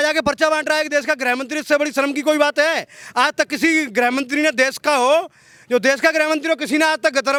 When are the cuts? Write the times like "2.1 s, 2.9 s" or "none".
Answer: none

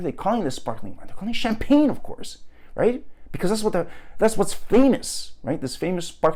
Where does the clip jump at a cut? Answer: none

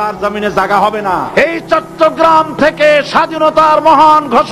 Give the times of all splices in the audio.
1.3 s

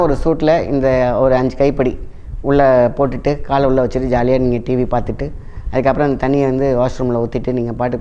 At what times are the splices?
none

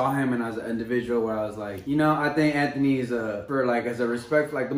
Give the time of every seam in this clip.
1.7 s, 3.4 s

